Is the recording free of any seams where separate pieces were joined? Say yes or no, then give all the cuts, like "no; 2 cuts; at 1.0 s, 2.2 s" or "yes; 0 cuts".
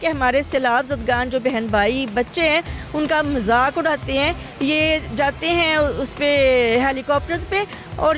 yes; 0 cuts